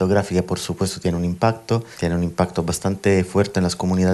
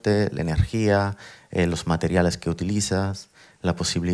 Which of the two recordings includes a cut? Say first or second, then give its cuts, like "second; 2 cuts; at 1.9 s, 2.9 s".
first; 1 cut; at 1.9 s